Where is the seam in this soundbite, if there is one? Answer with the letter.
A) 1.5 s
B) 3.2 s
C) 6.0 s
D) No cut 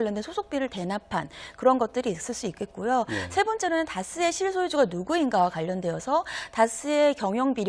B